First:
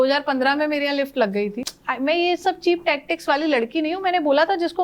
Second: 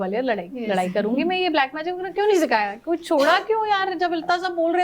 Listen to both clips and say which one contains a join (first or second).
first